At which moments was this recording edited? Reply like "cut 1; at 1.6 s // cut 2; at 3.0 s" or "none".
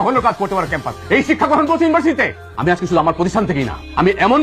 cut 1; at 2.4 s